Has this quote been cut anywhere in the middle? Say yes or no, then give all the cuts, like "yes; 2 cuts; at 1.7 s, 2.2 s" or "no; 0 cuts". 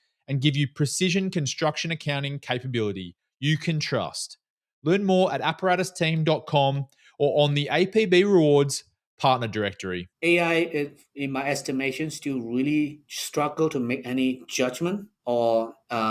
yes; 1 cut; at 10.1 s